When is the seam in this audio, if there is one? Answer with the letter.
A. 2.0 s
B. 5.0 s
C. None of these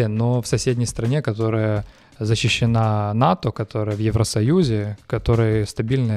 C